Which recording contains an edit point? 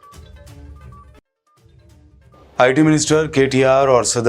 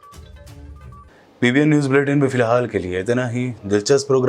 first; 1 cut; at 0.9 s

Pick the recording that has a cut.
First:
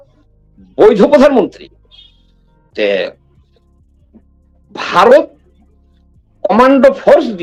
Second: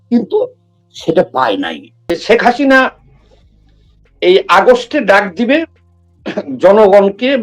second; 1 cut; at 2.1 s

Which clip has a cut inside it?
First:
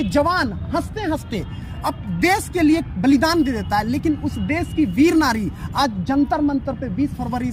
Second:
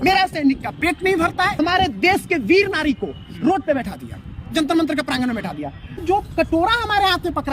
second; 2 cuts; at 1.6 s, 6.0 s

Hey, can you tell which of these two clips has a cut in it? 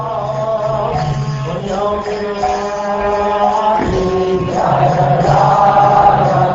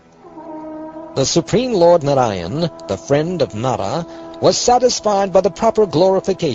first; 1 cut; at 3.2 s

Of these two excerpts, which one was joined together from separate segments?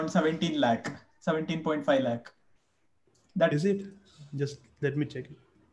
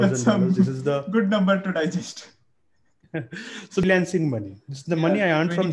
second; 1 cut; at 3.8 s

